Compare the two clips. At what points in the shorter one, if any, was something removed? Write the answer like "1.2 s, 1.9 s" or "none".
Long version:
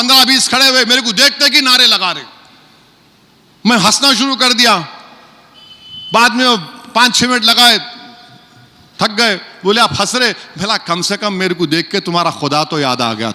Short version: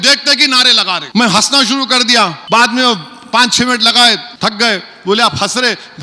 1.0 s, 2.4 s, 4.3 s